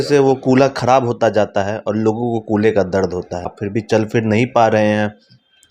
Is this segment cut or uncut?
cut